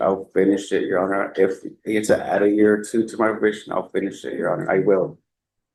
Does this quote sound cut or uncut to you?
uncut